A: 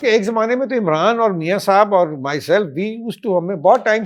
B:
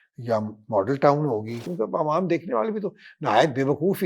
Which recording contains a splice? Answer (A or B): B